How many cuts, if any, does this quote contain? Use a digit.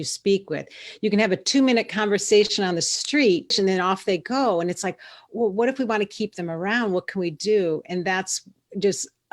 1